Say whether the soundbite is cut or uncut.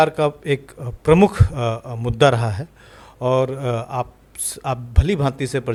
uncut